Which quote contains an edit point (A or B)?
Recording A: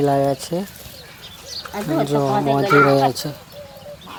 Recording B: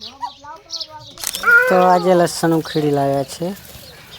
B